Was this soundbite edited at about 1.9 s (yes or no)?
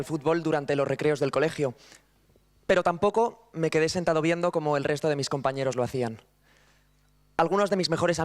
yes